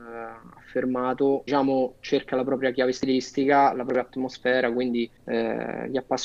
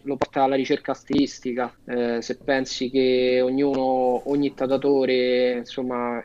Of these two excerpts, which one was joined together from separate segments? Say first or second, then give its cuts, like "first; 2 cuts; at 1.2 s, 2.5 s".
first; 1 cut; at 1.4 s